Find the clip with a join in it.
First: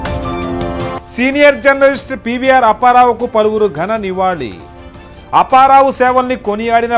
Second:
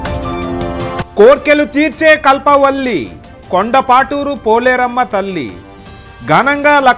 first; 1 cut; at 0.9 s

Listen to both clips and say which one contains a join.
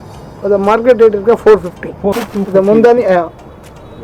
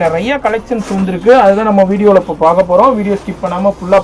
first; 1 cut; at 2.2 s

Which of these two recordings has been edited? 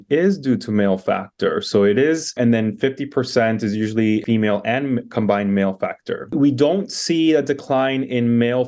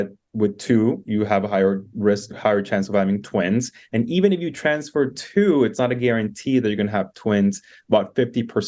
first; 3 cuts; at 2.3 s, 4.2 s, 6.2 s

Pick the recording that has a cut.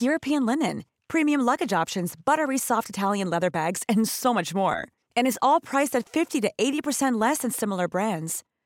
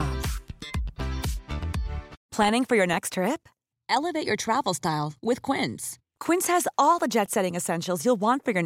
second; 1 cut; at 2.2 s

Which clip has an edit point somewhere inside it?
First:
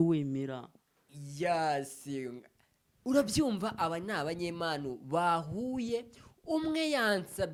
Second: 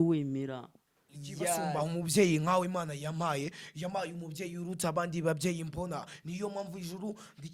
second; 1 cut; at 1.6 s

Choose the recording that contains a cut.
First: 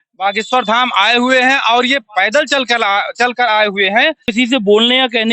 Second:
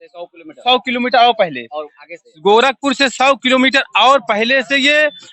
first; 1 cut; at 4.3 s

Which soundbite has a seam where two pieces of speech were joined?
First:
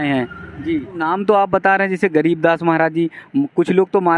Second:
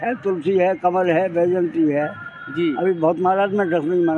first; 1 cut; at 1.0 s

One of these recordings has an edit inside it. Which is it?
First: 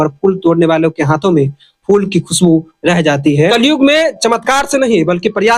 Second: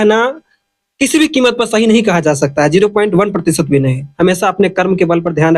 first; 1 cut; at 3.5 s

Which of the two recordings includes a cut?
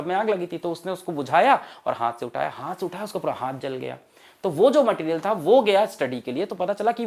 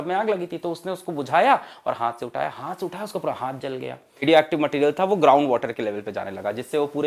second; 1 cut; at 4.2 s

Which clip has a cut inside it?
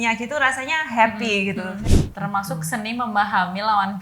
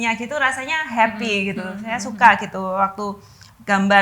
first; 1 cut; at 1.8 s

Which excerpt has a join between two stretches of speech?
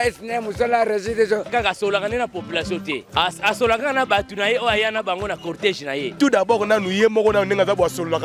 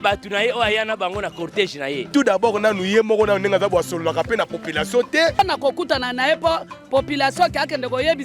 second; 1 cut; at 5.4 s

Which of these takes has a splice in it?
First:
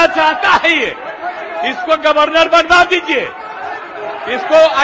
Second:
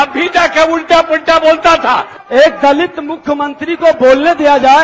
second; 1 cut; at 2.1 s

